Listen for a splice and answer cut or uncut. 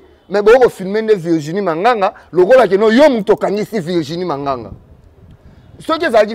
uncut